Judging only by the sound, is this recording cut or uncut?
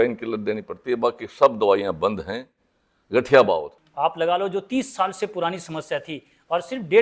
cut